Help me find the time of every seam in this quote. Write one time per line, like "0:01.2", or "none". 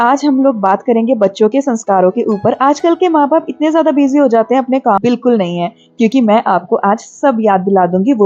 0:05.0